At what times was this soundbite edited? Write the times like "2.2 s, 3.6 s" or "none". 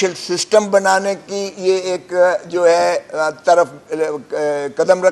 none